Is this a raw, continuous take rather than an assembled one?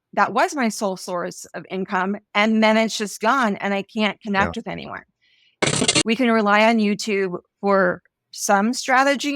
no; 1 cut; at 5.7 s

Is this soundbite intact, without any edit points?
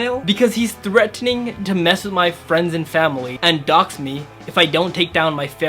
yes; 0 cuts

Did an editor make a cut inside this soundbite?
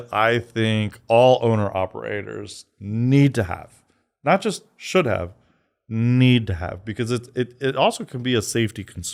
no; 0 cuts

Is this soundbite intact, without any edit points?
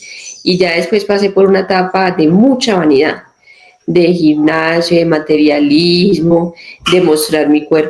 yes; 0 cuts

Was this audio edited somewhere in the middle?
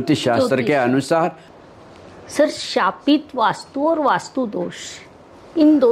yes; 1 cut; at 1.5 s

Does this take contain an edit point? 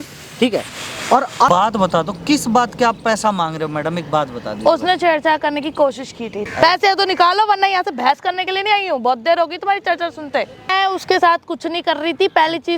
yes; 3 cuts; at 1.5 s, 6.4 s, 10.7 s

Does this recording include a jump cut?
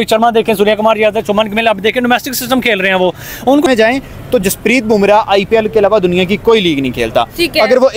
yes; 1 cut; at 3.7 s

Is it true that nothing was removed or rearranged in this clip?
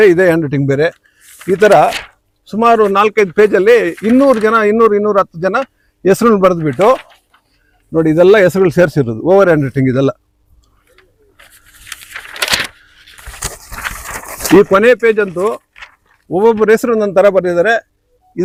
yes; 0 cuts

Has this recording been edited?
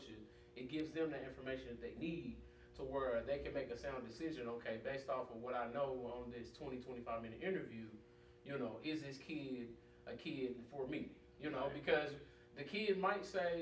no; 0 cuts

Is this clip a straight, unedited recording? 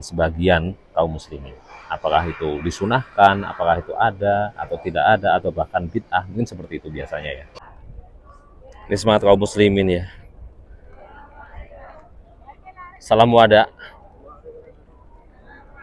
no; 1 cut; at 7.5 s

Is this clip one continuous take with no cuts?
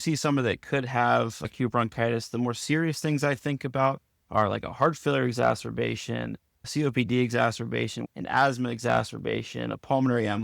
no; 1 cut; at 8.0 s

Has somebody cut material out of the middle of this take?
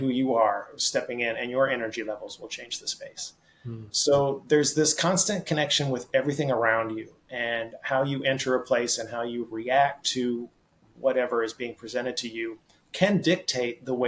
no; 0 cuts

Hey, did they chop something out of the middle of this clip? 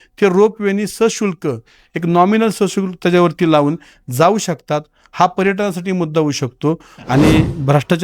yes; 1 cut; at 6.9 s

